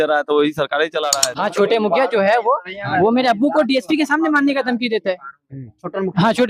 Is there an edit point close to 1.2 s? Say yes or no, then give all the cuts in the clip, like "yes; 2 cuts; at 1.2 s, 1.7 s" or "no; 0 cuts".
yes; 1 cut; at 1.2 s